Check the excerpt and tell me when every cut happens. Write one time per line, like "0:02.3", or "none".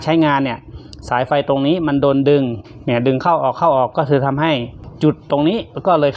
0:04.8